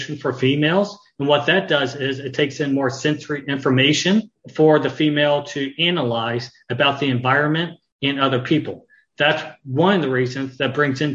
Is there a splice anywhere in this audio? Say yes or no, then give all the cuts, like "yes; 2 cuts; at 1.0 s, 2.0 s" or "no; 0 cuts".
yes; 1 cut; at 4.4 s